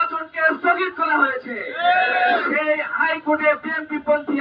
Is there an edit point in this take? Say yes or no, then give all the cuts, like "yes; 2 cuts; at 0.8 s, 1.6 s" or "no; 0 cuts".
no; 0 cuts